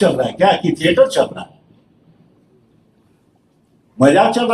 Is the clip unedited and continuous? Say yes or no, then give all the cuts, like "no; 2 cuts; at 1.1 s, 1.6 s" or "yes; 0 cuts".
yes; 0 cuts